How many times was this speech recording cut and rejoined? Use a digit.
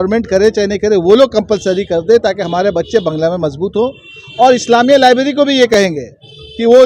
1